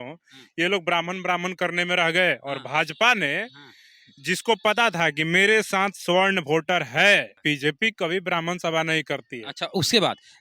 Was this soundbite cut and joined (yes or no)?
yes